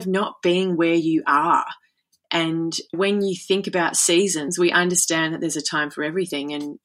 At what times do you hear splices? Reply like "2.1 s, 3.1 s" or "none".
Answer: 2.9 s, 4.5 s

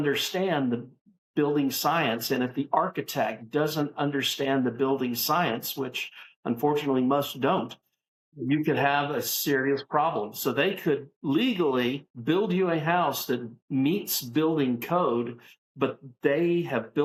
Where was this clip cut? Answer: none

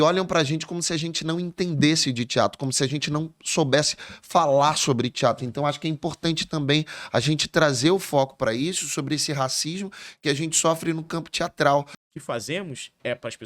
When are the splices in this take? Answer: 12.0 s

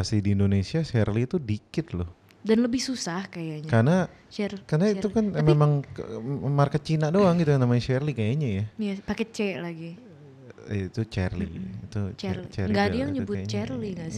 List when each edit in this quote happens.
none

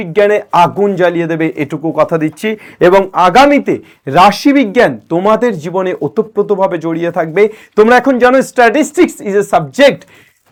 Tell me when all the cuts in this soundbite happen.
none

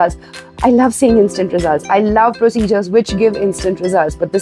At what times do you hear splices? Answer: none

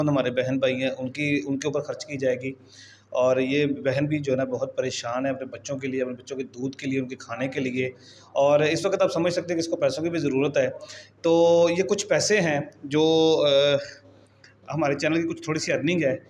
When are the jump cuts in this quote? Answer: none

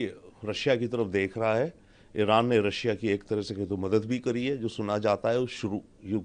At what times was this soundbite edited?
none

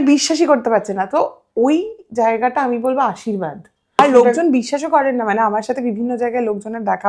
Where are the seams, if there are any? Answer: 4.0 s

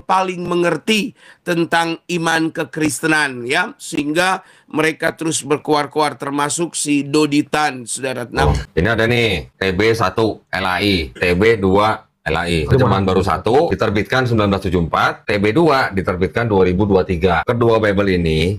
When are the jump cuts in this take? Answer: 8.4 s

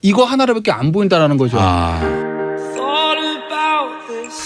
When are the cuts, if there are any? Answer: 1.9 s

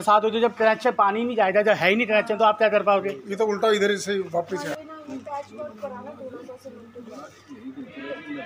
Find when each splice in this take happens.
4.7 s

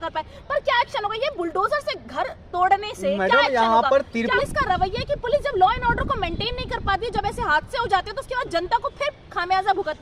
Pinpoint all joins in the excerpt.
4.3 s

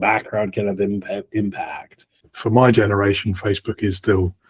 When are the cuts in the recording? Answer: 2.2 s

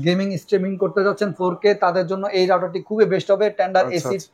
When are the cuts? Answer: none

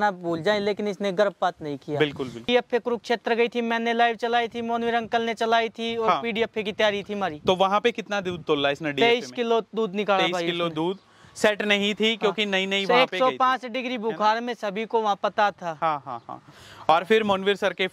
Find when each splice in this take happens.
2.5 s

